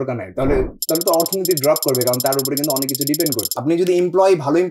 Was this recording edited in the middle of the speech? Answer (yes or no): yes